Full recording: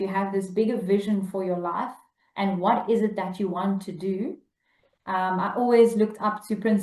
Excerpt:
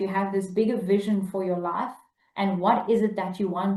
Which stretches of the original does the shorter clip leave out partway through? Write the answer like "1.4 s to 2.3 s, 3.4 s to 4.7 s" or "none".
none